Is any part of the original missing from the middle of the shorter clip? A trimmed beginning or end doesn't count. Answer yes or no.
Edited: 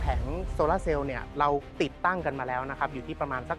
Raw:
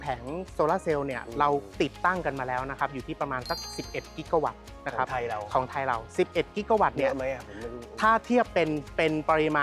no